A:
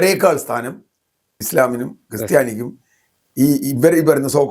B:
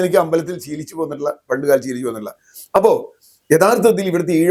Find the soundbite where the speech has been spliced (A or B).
A